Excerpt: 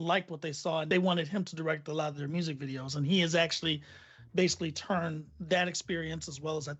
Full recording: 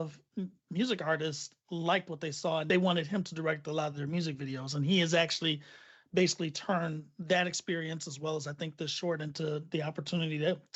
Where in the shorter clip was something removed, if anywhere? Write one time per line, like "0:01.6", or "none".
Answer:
none